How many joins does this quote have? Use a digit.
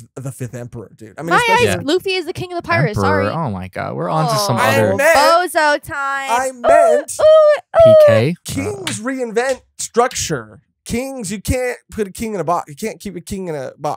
2